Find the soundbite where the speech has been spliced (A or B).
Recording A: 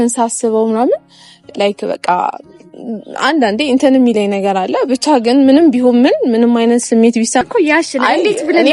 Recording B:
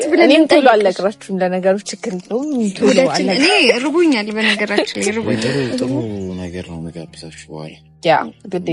A